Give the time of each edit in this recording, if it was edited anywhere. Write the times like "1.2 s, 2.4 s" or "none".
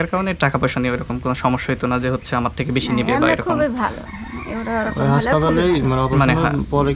none